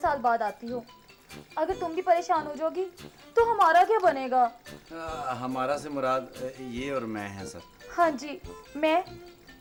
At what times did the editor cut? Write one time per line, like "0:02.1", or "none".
none